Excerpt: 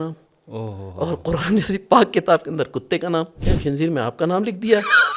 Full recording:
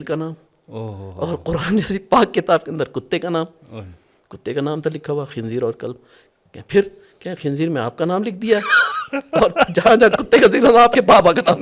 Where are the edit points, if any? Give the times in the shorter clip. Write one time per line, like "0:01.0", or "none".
0:03.4